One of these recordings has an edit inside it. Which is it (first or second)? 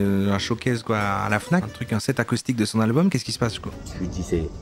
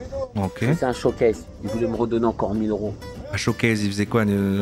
first